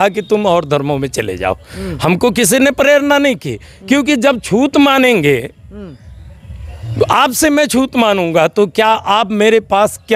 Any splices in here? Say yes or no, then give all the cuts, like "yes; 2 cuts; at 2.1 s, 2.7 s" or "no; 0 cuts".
no; 0 cuts